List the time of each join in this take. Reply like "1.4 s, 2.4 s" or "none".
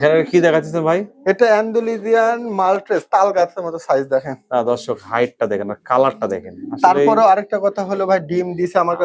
none